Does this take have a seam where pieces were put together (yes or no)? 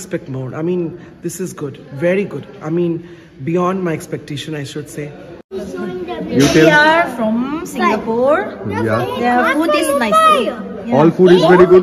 yes